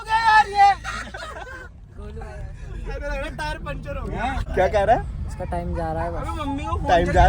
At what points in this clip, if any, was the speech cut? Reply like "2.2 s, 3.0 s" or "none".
4.5 s

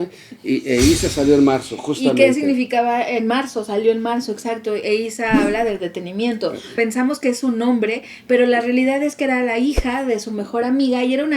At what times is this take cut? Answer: 6.6 s

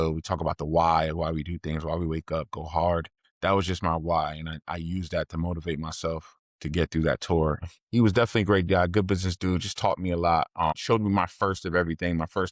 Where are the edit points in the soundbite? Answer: 7.6 s

